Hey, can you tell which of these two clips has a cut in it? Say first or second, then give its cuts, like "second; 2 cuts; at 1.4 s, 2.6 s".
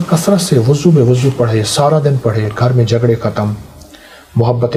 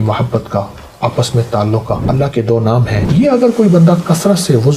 second; 2 cuts; at 2.1 s, 3.0 s